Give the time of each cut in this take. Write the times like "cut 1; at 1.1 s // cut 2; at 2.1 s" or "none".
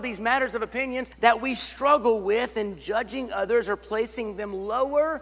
cut 1; at 1.1 s